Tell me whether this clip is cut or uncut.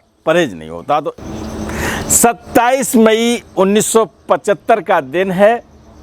cut